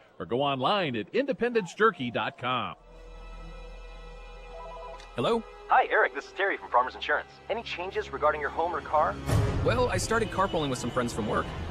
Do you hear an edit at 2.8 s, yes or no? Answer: yes